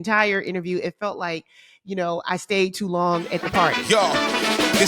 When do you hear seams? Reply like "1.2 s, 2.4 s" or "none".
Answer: 3.8 s